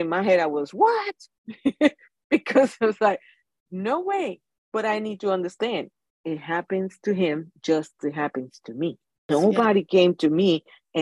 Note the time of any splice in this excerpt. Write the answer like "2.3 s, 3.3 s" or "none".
9.2 s